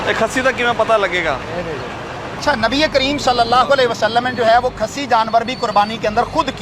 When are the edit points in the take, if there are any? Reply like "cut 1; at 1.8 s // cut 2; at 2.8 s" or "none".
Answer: cut 1; at 2.4 s